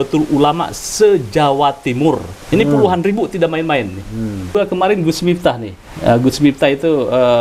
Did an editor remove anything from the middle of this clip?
yes; 1 cut; at 4.5 s

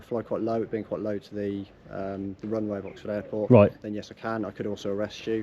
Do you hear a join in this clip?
no; 0 cuts

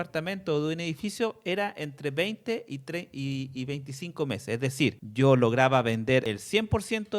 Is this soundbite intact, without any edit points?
no; 2 cuts; at 5.0 s, 6.2 s

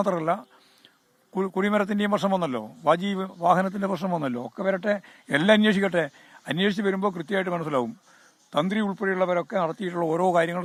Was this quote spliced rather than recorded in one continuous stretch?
no; 0 cuts

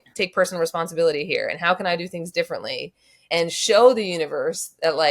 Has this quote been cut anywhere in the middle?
yes; 1 cut; at 3.3 s

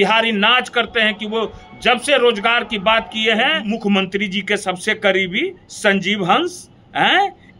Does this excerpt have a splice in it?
yes; 1 cut; at 3.6 s

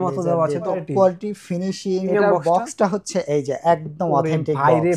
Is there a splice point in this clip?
yes; 2 cuts; at 0.8 s, 2.1 s

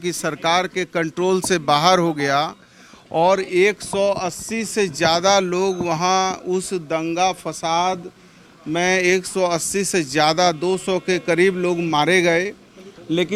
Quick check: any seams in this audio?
no; 0 cuts

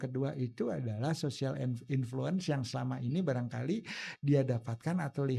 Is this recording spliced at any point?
no; 0 cuts

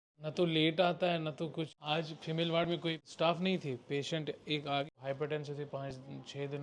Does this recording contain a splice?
yes; 3 cuts; at 1.7 s, 3.0 s, 4.9 s

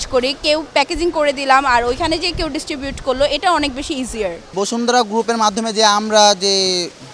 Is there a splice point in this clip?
no; 0 cuts

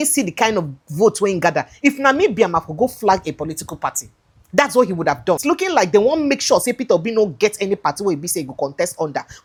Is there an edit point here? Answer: no; 0 cuts

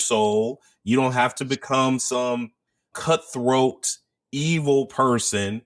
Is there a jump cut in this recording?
no; 0 cuts

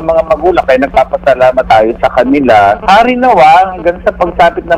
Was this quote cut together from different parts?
yes; 2 cuts; at 1.7 s, 2.8 s

